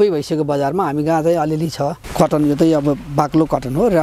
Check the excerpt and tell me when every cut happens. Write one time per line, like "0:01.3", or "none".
0:02.1